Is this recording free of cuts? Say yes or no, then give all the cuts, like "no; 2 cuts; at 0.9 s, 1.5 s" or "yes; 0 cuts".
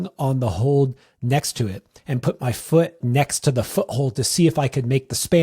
no; 1 cut; at 3.0 s